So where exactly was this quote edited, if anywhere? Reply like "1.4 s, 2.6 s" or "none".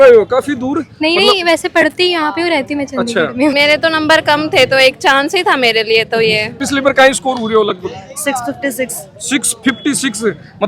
3.5 s, 6.6 s